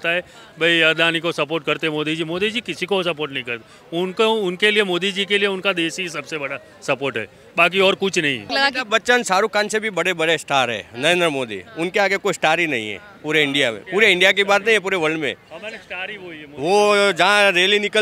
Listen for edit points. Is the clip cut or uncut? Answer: cut